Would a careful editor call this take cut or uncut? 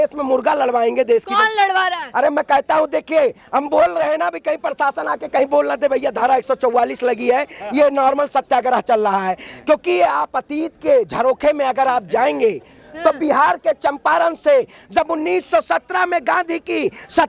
uncut